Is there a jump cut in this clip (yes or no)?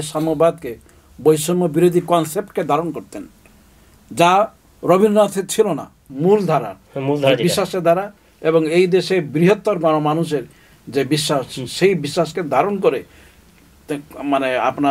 yes